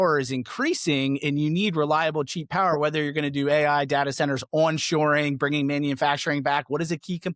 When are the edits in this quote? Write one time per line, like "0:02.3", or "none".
none

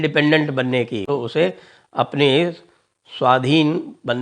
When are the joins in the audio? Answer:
0:01.0

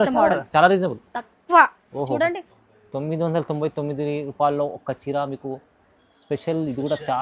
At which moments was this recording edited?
0:02.6

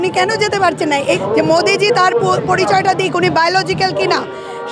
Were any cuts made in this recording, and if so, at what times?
0:01.2

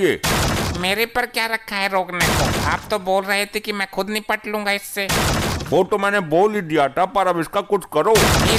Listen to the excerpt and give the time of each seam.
none

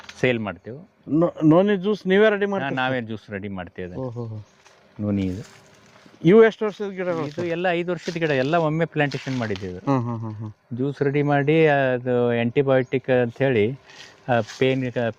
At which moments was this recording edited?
none

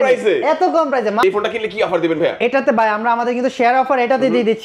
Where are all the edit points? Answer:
0:01.2

